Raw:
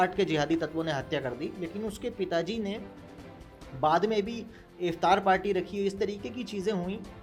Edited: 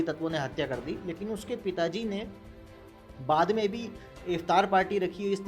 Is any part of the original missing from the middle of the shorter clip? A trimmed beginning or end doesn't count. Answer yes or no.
no